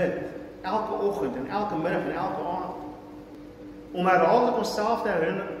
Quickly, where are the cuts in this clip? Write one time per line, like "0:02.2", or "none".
0:03.3